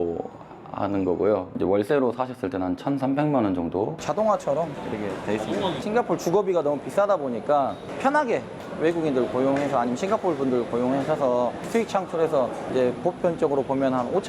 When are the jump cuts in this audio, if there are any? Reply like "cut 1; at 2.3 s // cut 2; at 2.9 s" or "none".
cut 1; at 3.9 s // cut 2; at 7.9 s

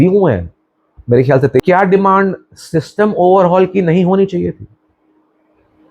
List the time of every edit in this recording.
cut 1; at 1.6 s

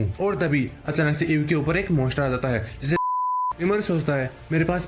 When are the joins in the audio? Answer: cut 1; at 3.2 s

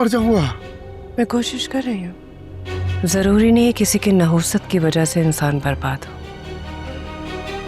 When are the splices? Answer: cut 1; at 2.9 s

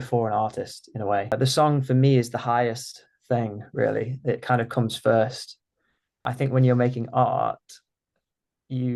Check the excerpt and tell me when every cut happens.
cut 1; at 1.3 s // cut 2; at 6.2 s

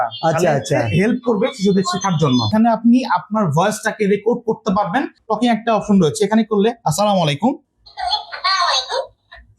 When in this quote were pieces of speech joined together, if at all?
cut 1; at 2.5 s // cut 2; at 5.2 s

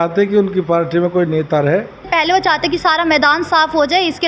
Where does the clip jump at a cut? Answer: cut 1; at 2.1 s

